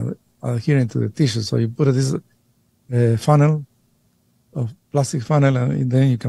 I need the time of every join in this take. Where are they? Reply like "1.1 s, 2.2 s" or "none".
none